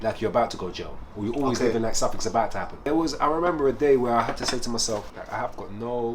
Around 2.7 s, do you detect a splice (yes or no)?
yes